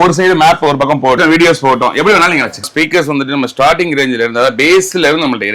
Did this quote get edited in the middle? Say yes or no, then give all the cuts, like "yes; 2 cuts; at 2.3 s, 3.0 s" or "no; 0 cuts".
yes; 2 cuts; at 1.2 s, 2.7 s